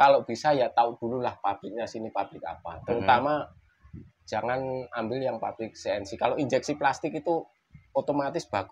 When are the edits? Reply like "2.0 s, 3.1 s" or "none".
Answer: none